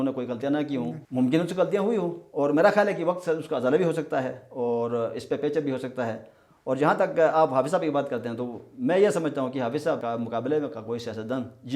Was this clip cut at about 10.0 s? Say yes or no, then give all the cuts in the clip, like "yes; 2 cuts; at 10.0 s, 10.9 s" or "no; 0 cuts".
yes; 2 cuts; at 1.0 s, 10.0 s